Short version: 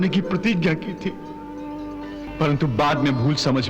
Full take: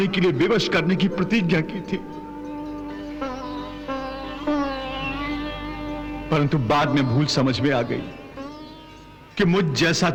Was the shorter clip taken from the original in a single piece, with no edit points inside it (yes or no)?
no